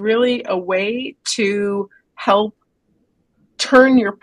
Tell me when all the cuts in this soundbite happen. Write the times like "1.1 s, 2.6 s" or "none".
none